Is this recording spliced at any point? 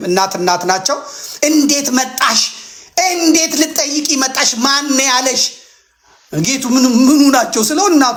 no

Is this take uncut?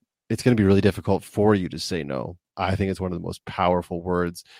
no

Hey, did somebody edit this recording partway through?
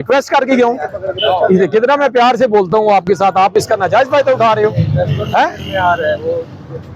no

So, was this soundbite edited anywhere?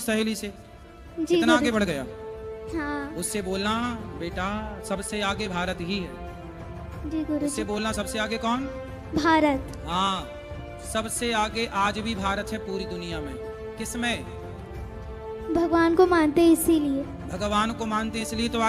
no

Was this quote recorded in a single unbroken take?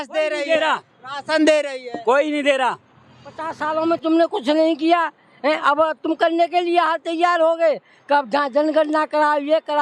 no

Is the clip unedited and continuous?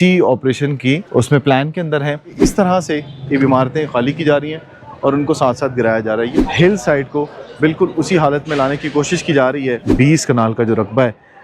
no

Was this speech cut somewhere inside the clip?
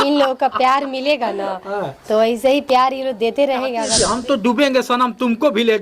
yes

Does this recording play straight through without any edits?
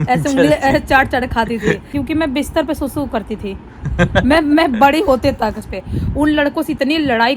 no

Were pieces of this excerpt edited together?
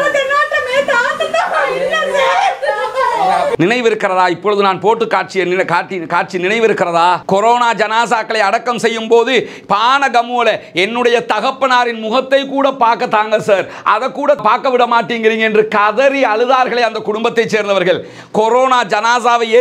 no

